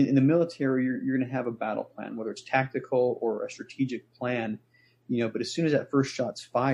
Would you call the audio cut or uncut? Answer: uncut